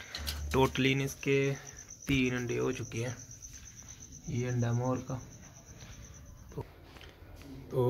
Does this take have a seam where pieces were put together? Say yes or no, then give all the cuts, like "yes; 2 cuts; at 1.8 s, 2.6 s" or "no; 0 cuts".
yes; 1 cut; at 6.5 s